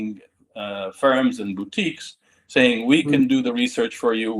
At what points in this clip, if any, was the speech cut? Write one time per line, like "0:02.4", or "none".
none

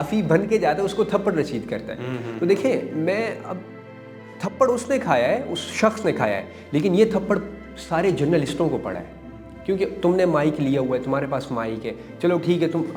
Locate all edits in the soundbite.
none

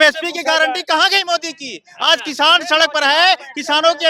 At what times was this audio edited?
none

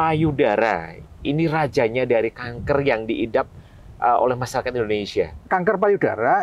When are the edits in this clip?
0:05.4

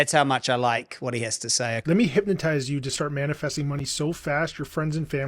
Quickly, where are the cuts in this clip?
0:01.8

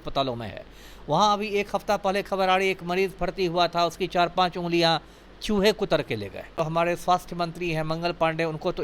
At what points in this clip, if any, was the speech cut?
0:06.8

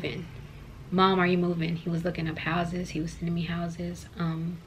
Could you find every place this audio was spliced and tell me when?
none

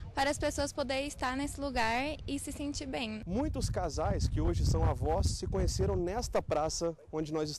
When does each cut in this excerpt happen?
0:03.2

